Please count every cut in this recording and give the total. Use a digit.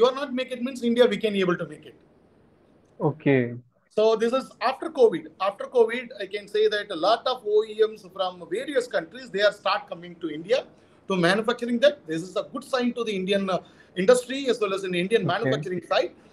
0